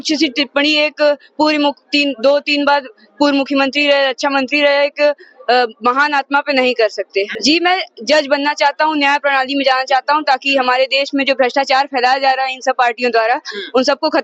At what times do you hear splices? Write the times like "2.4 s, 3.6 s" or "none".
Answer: 7.3 s